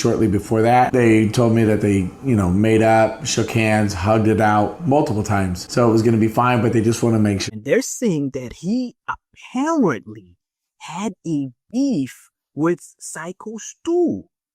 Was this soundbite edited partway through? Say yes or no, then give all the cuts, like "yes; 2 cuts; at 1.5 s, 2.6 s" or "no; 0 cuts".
yes; 1 cut; at 7.5 s